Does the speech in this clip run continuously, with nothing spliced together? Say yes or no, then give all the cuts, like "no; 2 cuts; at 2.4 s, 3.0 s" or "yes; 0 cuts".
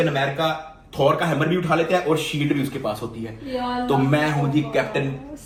yes; 0 cuts